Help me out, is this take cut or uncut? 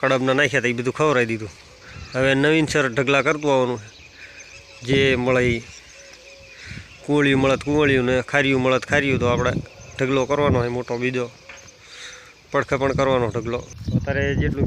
uncut